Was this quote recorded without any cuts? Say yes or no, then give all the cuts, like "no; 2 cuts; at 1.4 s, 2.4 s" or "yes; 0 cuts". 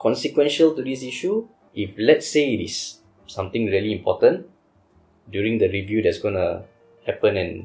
no; 1 cut; at 1.6 s